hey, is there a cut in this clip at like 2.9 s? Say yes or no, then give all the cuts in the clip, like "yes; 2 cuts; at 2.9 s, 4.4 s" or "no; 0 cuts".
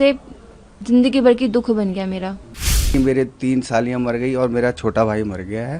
yes; 1 cut; at 2.9 s